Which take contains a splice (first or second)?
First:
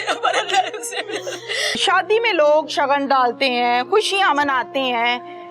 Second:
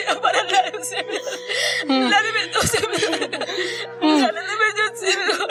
first